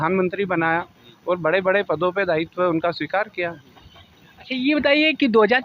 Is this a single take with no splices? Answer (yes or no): yes